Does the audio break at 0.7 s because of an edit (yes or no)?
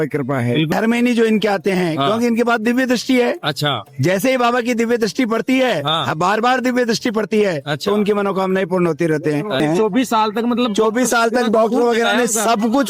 yes